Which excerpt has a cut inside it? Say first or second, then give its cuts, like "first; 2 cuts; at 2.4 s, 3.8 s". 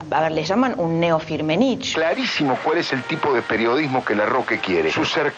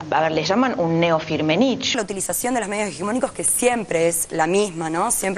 second; 1 cut; at 2.0 s